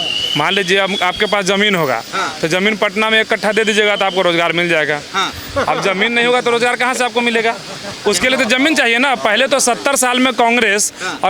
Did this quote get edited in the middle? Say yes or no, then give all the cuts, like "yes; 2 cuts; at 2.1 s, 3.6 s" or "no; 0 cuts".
no; 0 cuts